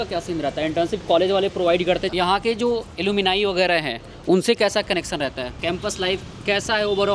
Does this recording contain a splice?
yes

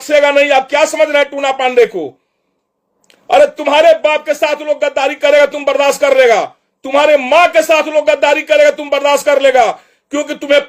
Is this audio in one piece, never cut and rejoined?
yes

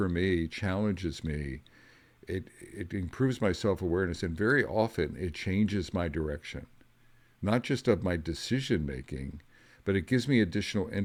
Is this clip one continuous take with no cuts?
yes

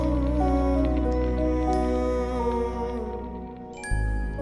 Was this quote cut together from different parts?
no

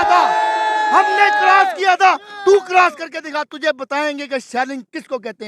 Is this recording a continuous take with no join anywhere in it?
yes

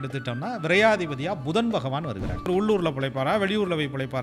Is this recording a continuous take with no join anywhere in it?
no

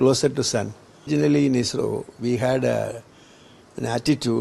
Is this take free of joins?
no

